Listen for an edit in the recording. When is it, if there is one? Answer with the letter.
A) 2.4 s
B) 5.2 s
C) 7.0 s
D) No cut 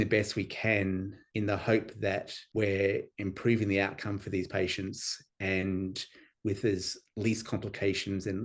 D